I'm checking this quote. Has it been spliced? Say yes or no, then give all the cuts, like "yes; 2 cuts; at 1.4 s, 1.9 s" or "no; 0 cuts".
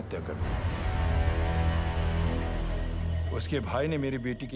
no; 0 cuts